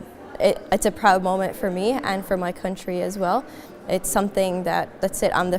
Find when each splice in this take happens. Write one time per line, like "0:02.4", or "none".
none